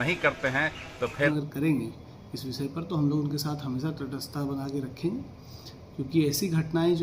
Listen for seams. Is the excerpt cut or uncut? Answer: cut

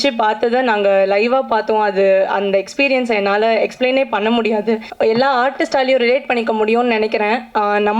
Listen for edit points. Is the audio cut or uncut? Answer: cut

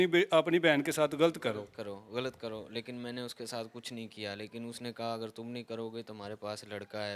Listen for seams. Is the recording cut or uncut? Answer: uncut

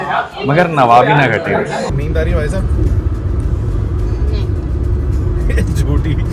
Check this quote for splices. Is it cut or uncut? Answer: cut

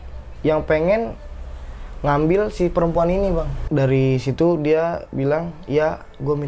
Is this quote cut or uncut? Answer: cut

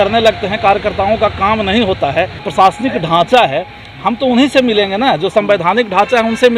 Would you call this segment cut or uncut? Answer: cut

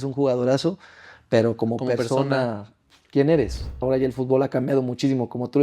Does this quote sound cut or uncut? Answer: cut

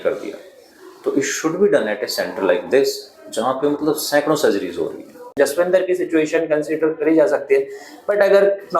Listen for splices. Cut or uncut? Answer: cut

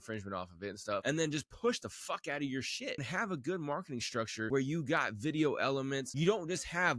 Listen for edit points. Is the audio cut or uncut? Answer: cut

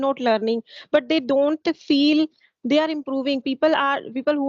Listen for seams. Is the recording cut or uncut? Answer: uncut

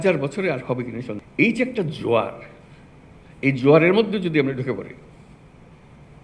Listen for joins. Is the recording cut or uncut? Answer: cut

